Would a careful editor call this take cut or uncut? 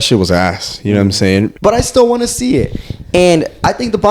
cut